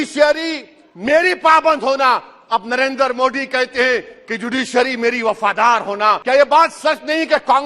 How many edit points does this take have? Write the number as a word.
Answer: one